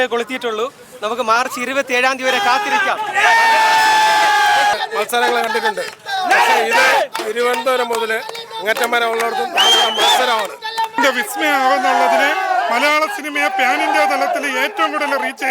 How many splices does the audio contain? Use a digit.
2